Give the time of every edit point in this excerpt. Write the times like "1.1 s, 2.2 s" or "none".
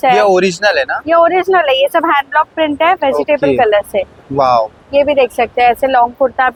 none